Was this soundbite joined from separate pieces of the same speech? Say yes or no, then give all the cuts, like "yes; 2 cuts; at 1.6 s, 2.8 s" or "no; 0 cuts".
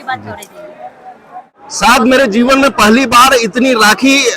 yes; 1 cut; at 1.5 s